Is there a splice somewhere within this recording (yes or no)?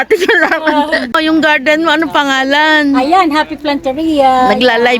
yes